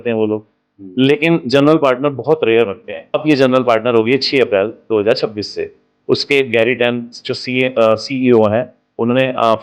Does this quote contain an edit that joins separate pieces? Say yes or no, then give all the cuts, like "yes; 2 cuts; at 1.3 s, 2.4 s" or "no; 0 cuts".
yes; 1 cut; at 3.2 s